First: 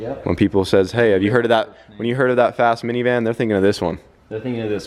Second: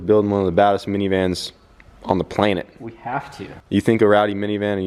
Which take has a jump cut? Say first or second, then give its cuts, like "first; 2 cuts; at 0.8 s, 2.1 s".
second; 1 cut; at 3.7 s